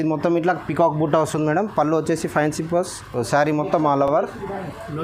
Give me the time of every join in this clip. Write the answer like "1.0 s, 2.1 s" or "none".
none

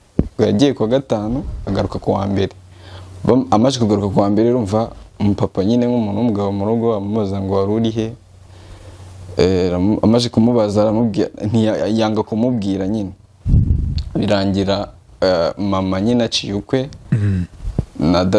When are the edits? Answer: 13.3 s

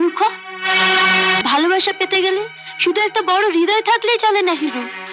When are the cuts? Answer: 1.4 s

